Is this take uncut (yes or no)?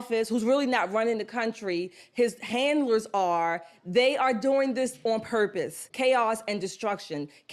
no